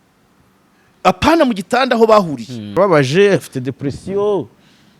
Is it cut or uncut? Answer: cut